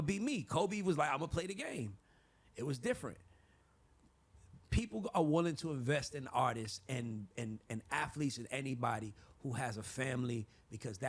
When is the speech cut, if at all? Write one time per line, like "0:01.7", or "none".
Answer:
none